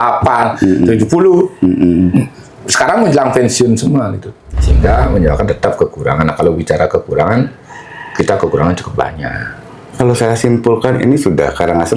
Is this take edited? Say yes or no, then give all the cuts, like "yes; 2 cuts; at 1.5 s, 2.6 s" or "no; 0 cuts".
yes; 1 cut; at 4.5 s